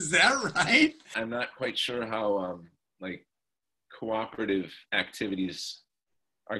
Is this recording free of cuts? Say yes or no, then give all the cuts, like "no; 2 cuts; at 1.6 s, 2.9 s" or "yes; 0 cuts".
no; 1 cut; at 1.1 s